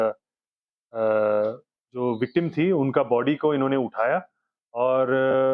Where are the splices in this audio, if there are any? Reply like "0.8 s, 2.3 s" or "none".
none